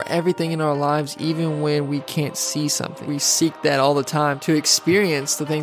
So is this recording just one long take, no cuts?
no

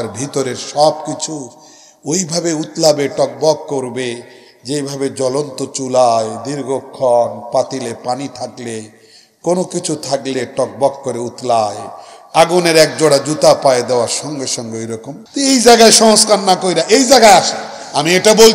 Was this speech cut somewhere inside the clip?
yes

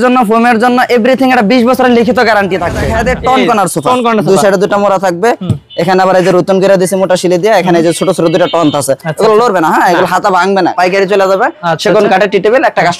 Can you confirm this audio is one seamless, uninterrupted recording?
no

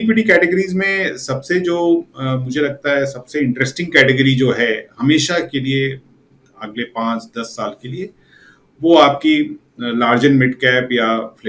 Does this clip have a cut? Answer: no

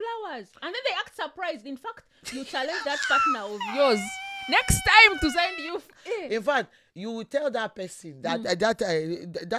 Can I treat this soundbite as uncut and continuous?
yes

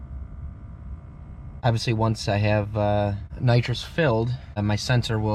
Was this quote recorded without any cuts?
no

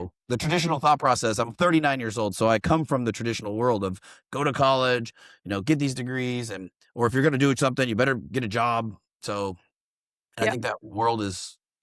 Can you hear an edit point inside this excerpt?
no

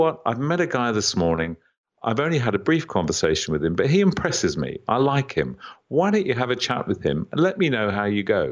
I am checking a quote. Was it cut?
no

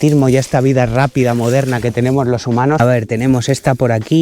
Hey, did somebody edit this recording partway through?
yes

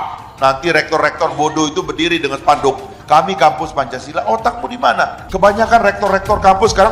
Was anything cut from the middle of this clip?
yes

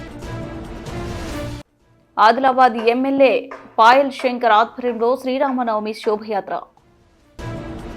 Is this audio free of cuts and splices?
no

